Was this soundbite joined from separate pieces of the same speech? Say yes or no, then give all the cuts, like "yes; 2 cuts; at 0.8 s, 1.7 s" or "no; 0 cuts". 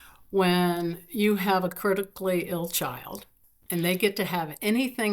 yes; 1 cut; at 3.5 s